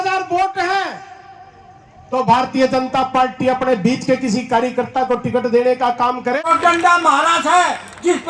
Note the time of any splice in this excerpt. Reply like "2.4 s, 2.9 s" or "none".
6.5 s